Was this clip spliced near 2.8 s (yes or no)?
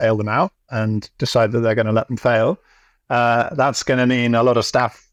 no